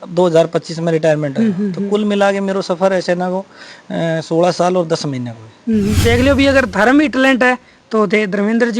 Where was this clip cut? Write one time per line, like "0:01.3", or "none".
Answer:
0:06.0